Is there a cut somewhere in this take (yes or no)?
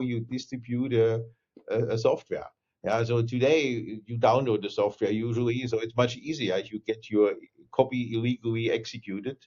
no